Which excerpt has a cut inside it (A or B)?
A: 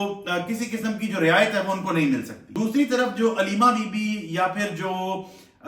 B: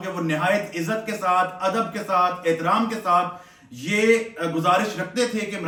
A